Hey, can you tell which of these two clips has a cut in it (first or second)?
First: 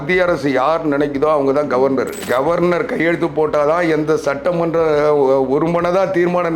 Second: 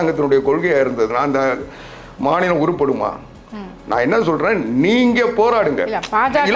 first